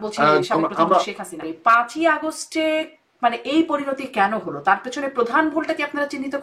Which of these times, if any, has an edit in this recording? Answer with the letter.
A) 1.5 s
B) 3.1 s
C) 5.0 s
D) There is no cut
A